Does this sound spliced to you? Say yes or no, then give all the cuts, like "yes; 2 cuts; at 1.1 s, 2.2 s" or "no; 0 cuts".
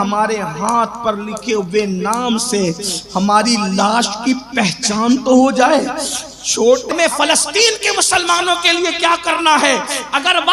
yes; 1 cut; at 6.9 s